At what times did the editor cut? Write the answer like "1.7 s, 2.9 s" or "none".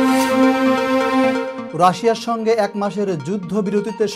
1.6 s